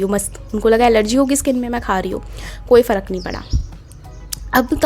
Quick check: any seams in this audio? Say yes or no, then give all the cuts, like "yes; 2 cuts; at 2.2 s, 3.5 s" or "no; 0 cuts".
no; 0 cuts